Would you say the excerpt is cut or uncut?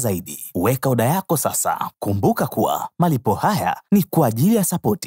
cut